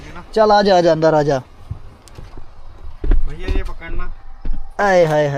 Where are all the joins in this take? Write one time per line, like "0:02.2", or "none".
none